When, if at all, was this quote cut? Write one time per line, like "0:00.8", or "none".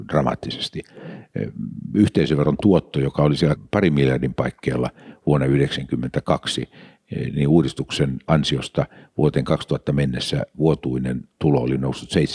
0:03.6